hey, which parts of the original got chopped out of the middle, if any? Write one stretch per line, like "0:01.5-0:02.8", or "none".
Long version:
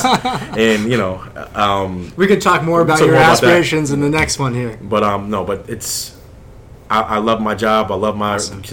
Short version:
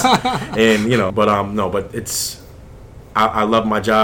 0:01.1-0:04.8